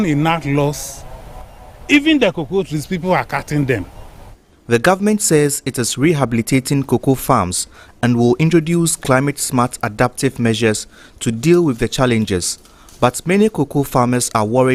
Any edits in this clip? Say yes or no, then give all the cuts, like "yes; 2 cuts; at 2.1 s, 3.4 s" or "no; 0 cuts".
no; 0 cuts